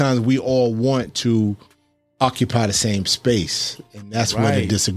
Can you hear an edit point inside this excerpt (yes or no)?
no